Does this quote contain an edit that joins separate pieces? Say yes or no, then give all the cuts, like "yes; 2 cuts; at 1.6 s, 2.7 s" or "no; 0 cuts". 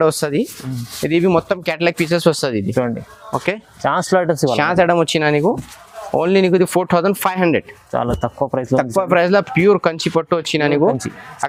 no; 0 cuts